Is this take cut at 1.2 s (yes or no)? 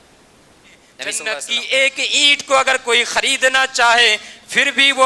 yes